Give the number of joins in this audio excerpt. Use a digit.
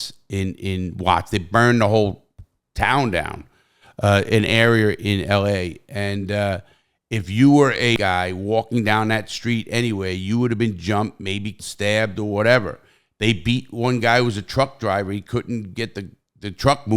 2